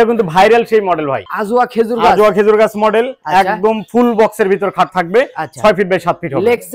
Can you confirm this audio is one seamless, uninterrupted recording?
yes; 0 cuts

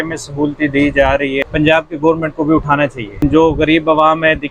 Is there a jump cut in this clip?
yes; 2 cuts; at 1.4 s, 3.2 s

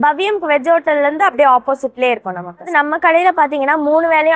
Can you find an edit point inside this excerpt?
yes; 1 cut; at 2.7 s

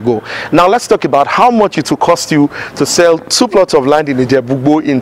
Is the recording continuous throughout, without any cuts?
yes; 0 cuts

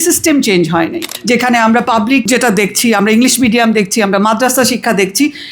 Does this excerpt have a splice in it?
yes; 2 cuts; at 1.1 s, 2.2 s

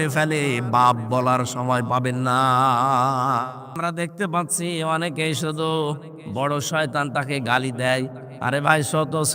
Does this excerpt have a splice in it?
yes; 1 cut; at 3.7 s

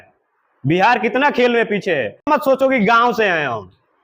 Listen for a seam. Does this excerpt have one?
yes; 1 cut; at 2.3 s

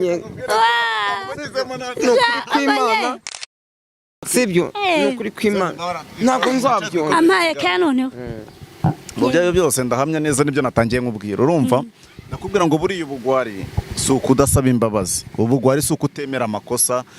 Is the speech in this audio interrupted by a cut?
no; 0 cuts

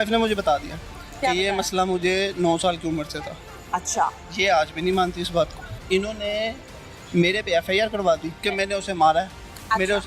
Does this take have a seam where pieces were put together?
yes; 2 cuts; at 5.7 s, 8.4 s

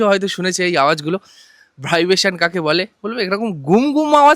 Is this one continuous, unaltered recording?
yes; 0 cuts

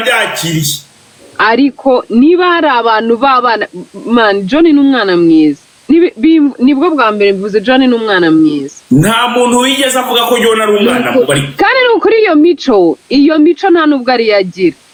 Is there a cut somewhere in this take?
no; 0 cuts

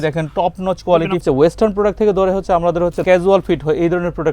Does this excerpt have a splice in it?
yes; 2 cuts; at 1.2 s, 3.0 s

